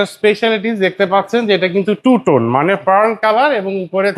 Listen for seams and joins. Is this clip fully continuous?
yes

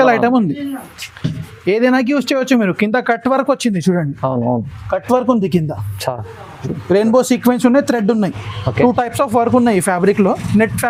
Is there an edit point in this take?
no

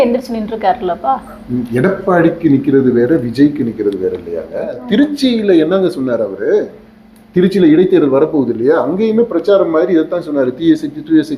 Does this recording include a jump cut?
yes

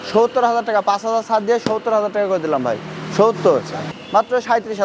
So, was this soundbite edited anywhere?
yes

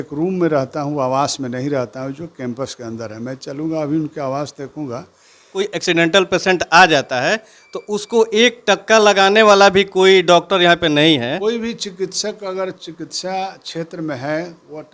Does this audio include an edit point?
yes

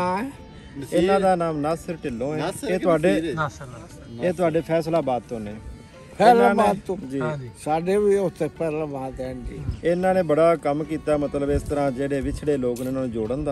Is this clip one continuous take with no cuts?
yes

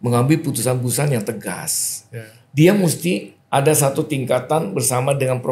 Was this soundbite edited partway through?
yes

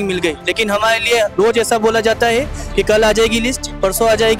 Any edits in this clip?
no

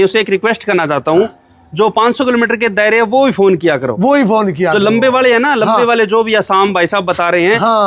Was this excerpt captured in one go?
yes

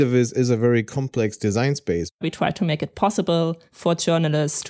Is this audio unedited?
no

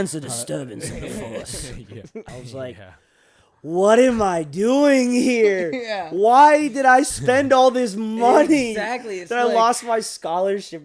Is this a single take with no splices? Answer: no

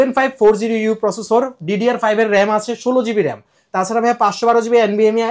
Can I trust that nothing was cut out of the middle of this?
yes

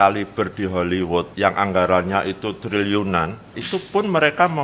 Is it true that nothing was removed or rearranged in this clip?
no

